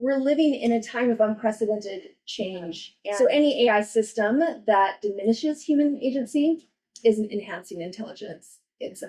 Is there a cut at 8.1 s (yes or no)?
no